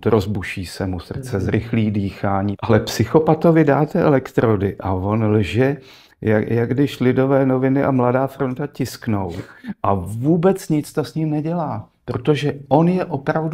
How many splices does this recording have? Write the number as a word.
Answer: one